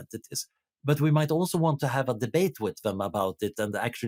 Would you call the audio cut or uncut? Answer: uncut